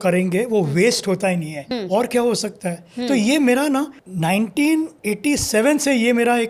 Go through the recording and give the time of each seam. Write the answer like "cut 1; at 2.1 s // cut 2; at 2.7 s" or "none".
cut 1; at 1.6 s // cut 2; at 4.0 s // cut 3; at 5.0 s